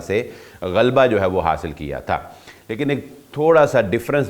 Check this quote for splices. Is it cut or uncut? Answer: uncut